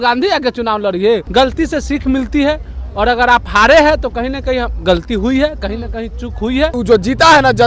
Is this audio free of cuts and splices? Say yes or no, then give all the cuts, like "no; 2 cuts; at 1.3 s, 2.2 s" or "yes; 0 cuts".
no; 2 cuts; at 1.3 s, 6.7 s